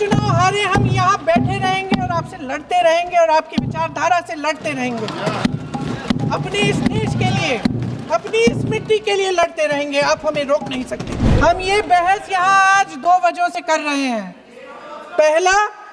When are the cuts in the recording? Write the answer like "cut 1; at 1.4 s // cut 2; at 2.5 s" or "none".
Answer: cut 1; at 11.2 s